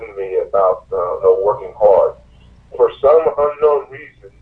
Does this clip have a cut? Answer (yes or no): no